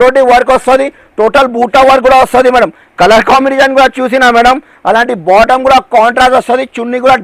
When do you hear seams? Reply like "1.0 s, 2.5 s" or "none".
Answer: none